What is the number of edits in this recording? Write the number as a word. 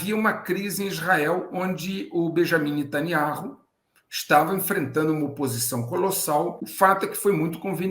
one